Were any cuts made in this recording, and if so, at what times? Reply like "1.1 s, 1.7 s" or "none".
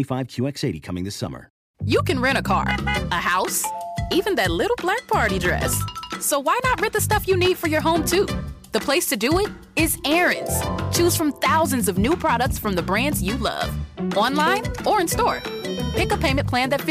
1.6 s